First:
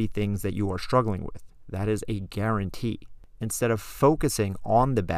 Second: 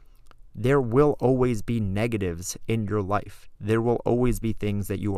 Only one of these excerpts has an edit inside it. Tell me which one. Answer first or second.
first